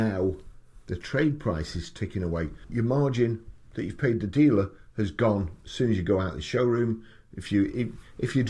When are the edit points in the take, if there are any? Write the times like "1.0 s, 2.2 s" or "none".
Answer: 2.6 s